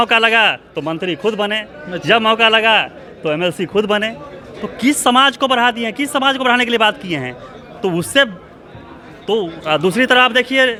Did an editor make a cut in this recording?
no; 0 cuts

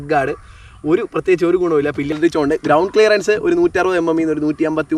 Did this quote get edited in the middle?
yes; 1 cut; at 2.1 s

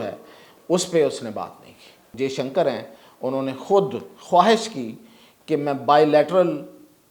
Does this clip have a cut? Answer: yes; 1 cut; at 2.1 s

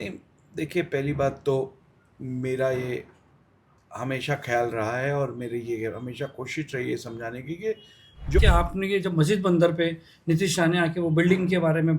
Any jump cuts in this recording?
yes; 1 cut; at 8.4 s

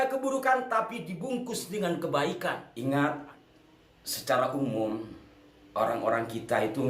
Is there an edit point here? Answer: yes; 1 cut; at 2.7 s

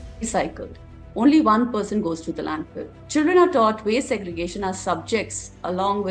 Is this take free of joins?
no; 1 cut; at 2.9 s

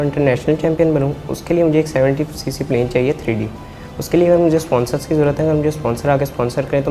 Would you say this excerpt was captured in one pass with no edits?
yes; 0 cuts

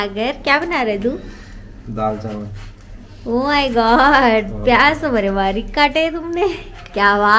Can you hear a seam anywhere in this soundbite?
no; 0 cuts

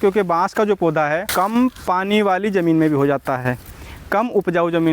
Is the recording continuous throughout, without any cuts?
no; 1 cut; at 1.3 s

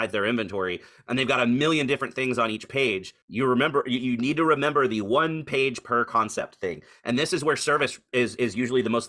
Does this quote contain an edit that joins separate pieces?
yes; 1 cut; at 3.2 s

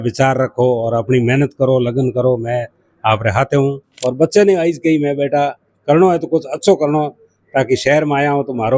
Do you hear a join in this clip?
yes; 1 cut; at 3.9 s

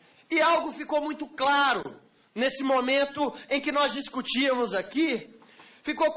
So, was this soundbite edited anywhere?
yes; 1 cut; at 2.8 s

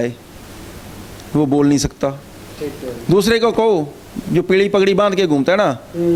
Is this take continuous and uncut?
yes; 0 cuts

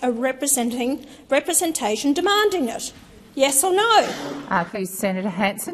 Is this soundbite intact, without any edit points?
no; 1 cut; at 4.7 s

